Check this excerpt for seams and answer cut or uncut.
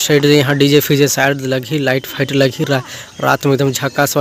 uncut